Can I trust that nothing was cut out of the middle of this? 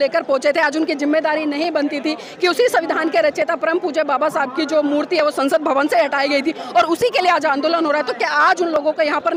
yes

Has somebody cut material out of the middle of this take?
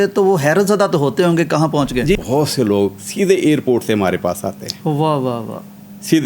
yes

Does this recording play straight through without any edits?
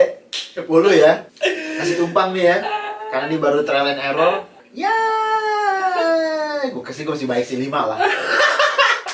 no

